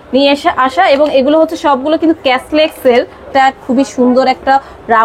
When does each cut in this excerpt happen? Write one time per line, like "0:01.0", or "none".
0:03.3